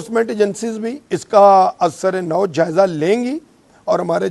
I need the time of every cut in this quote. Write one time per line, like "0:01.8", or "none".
0:01.0